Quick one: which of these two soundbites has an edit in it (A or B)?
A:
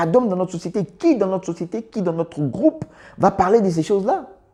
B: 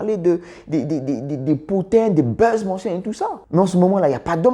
B